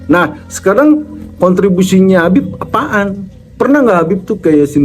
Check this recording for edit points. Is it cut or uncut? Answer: uncut